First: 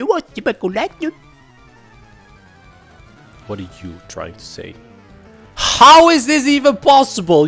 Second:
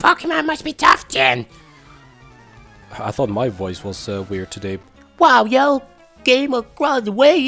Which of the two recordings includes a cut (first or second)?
second